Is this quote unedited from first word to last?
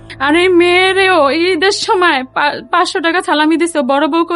yes; 0 cuts

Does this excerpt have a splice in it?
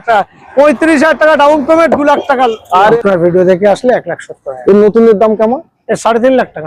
yes; 1 cut; at 3.0 s

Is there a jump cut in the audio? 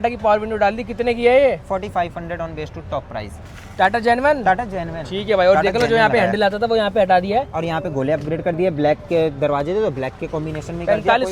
no; 0 cuts

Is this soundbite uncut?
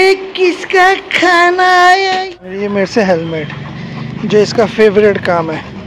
no; 1 cut; at 2.2 s

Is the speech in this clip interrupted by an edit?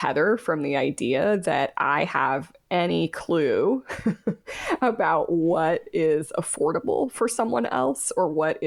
no; 0 cuts

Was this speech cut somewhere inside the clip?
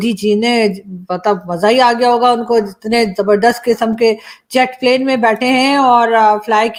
no; 0 cuts

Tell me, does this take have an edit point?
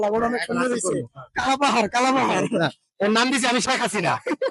no; 0 cuts

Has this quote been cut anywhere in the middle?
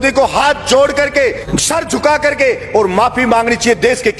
yes; 1 cut; at 1.5 s

